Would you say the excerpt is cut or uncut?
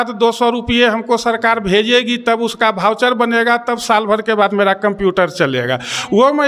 uncut